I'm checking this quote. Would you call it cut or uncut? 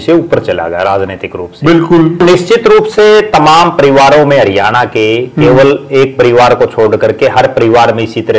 cut